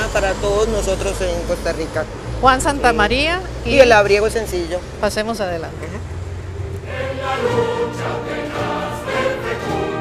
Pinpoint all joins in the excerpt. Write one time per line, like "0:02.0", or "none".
0:03.4